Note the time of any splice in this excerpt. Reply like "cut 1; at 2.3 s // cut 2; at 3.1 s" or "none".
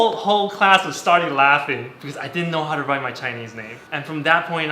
cut 1; at 1.9 s